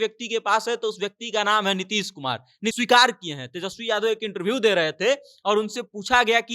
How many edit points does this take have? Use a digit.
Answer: 1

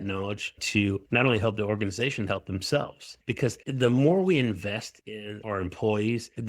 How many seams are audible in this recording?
1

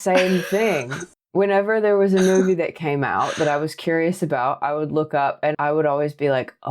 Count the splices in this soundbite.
1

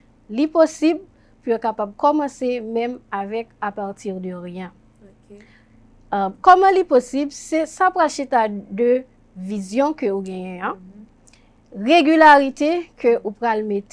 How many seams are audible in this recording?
0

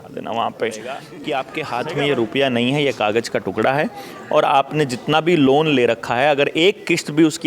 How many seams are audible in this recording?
1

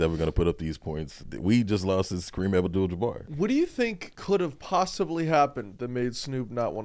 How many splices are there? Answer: 3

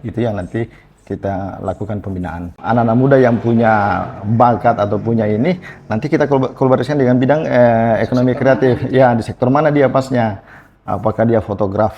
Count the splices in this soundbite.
1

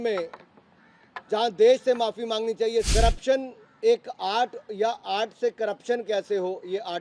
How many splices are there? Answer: 1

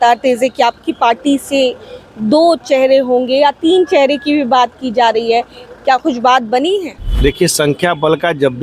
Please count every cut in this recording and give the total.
1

